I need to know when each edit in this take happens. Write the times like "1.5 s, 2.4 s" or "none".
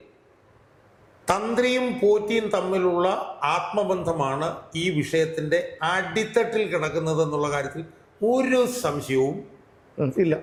none